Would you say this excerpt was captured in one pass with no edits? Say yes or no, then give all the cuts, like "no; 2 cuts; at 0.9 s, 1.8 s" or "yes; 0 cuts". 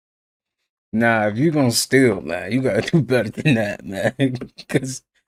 yes; 0 cuts